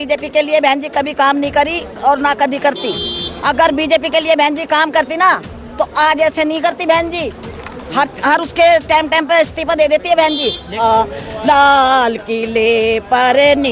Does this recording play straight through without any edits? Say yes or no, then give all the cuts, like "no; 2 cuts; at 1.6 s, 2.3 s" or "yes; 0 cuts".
no; 1 cut; at 10.8 s